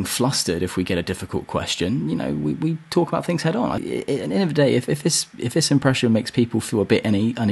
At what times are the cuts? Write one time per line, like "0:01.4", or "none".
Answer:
0:03.8